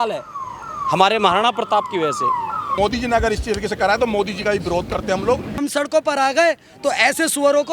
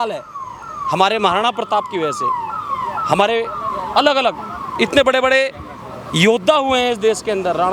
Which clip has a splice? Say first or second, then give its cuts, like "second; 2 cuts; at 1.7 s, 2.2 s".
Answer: first; 2 cuts; at 2.7 s, 5.6 s